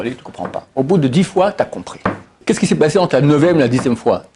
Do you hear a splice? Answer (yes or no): yes